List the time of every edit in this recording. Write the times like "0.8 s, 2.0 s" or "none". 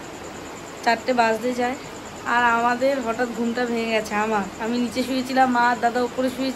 none